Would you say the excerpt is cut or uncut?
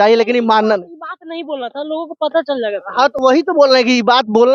uncut